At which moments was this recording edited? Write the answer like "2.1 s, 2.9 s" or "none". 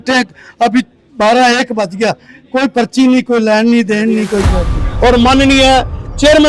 4.8 s